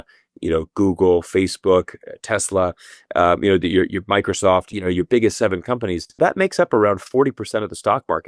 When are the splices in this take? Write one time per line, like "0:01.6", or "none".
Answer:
0:04.7
0:06.2